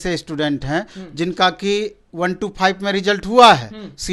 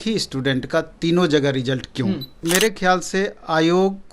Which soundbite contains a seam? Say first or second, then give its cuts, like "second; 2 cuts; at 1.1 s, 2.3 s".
second; 1 cut; at 2.3 s